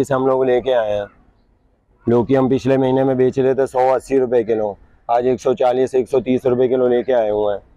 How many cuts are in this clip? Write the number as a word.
zero